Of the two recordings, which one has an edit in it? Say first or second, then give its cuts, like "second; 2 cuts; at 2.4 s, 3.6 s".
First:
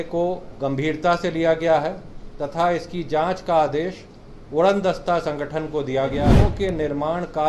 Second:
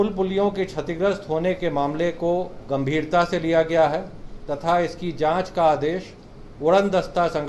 first; 1 cut; at 6.3 s